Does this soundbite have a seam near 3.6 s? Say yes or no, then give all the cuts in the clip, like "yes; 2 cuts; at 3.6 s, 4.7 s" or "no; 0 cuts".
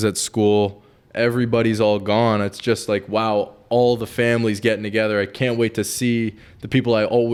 no; 0 cuts